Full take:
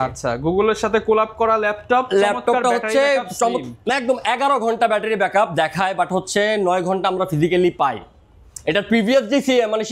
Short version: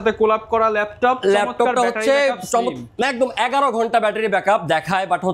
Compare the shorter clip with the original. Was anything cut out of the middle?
no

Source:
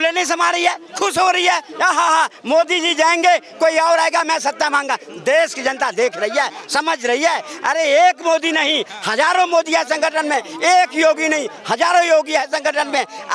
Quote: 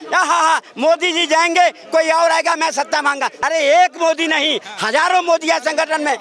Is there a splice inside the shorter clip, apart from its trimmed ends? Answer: yes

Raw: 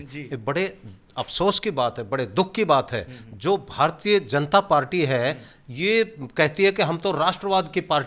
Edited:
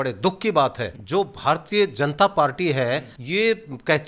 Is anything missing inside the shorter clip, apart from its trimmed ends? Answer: yes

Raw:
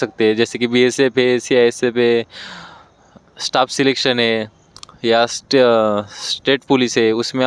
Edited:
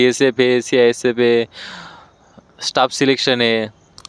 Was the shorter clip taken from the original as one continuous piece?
yes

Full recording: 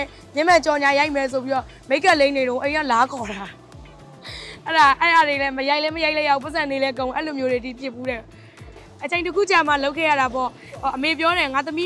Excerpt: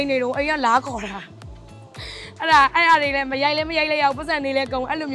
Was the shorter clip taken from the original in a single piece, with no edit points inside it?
yes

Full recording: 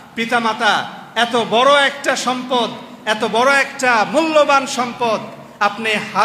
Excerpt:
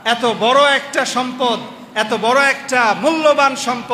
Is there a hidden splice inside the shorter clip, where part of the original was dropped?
no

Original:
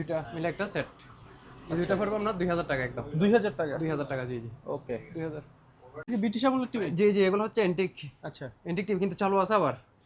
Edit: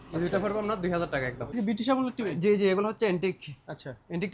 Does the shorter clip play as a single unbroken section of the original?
no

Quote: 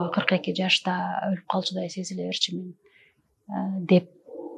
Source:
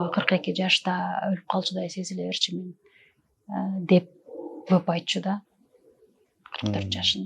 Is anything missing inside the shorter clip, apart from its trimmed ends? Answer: no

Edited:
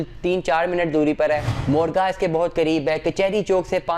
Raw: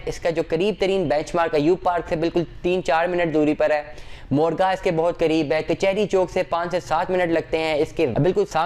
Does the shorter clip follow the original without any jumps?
no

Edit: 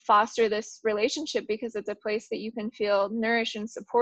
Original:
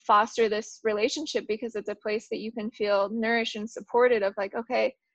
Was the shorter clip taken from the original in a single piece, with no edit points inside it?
yes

